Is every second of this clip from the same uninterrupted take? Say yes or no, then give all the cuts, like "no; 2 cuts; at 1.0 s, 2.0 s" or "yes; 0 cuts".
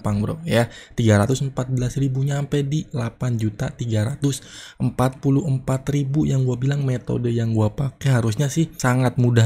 yes; 0 cuts